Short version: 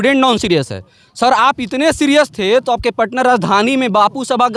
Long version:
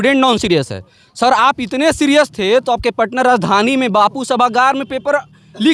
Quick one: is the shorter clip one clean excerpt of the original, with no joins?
yes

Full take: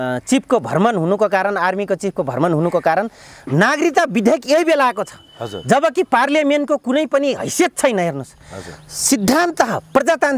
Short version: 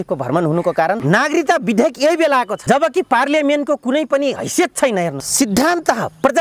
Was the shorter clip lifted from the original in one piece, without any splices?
no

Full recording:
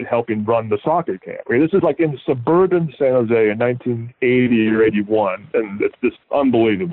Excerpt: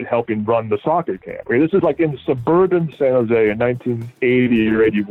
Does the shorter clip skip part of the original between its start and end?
no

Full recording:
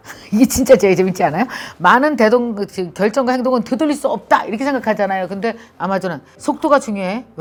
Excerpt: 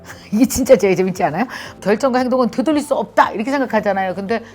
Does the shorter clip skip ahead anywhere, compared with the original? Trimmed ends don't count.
yes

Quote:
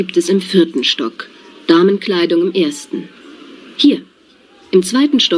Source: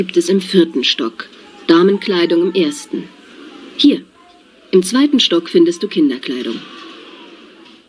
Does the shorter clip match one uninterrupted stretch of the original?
yes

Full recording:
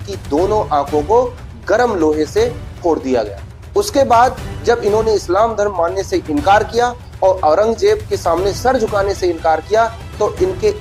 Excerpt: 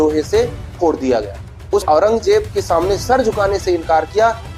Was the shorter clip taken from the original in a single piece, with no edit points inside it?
no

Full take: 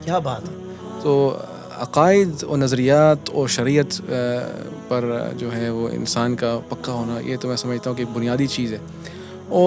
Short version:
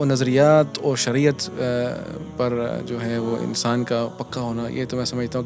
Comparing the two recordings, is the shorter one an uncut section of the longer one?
yes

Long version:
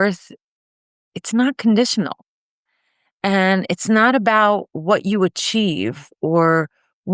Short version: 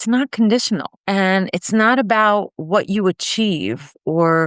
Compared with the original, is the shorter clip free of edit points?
no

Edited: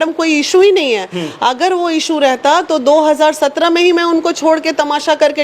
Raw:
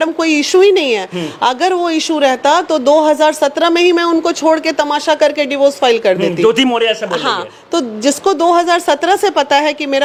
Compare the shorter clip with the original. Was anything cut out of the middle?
no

